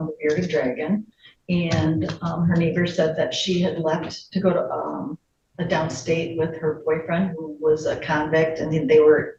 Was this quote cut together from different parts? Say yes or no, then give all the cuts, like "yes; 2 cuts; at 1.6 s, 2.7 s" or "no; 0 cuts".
no; 0 cuts